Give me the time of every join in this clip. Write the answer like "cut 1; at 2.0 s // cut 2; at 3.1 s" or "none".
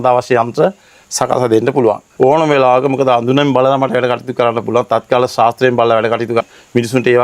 cut 1; at 2.1 s // cut 2; at 6.4 s